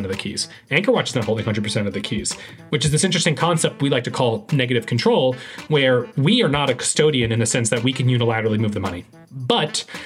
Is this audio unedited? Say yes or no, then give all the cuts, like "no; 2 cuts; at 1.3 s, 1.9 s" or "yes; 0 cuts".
no; 1 cut; at 9.0 s